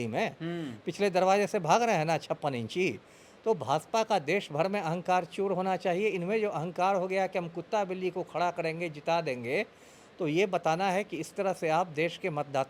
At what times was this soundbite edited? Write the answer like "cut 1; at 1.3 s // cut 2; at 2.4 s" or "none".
none